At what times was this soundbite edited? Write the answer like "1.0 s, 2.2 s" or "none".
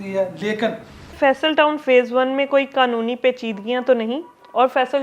1.1 s